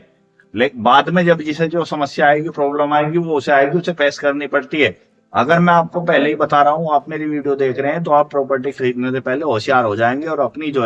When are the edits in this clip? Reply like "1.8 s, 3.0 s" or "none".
none